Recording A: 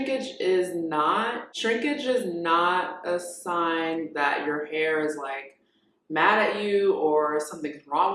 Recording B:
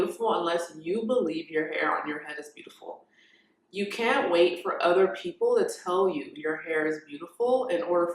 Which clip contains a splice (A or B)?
A